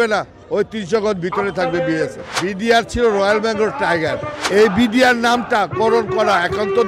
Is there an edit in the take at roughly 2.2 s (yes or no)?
yes